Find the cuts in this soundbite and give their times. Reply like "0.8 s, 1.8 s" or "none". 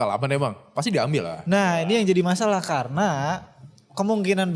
none

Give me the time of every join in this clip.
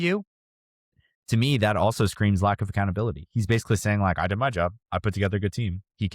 0.9 s

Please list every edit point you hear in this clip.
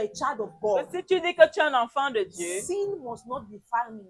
none

